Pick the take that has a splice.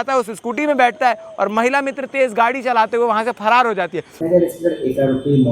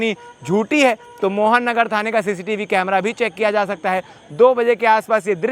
first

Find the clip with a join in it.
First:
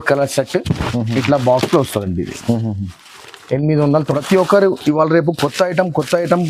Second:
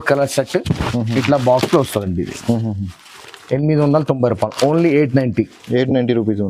first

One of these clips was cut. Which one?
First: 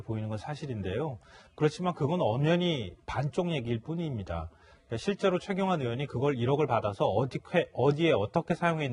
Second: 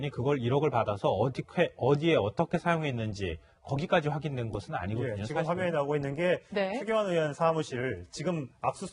second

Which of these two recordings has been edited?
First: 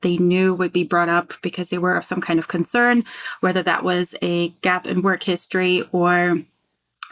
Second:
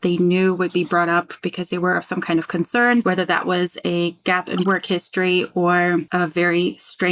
second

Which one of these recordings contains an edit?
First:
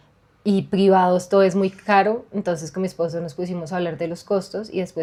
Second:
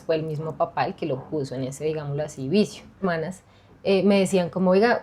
second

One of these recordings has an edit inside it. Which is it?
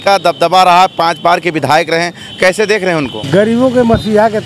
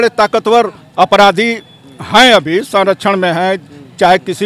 first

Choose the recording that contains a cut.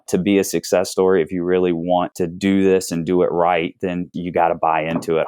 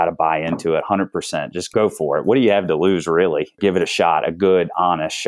second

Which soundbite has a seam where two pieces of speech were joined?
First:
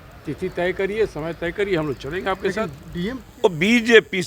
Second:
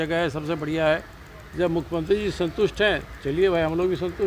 first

